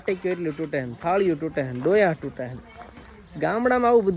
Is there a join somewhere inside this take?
no; 0 cuts

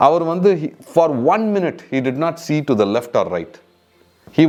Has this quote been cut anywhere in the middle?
no; 0 cuts

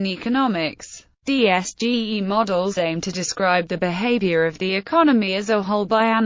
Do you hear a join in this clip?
no; 0 cuts

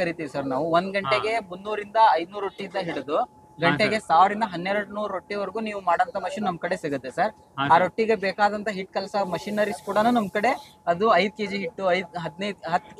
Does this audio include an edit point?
no; 0 cuts

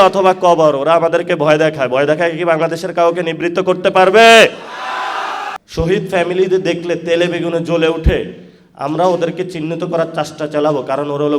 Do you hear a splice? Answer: yes; 1 cut; at 5.4 s

